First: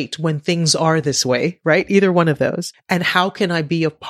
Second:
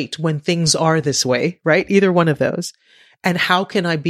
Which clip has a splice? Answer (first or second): first